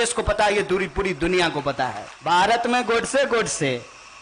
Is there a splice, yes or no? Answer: yes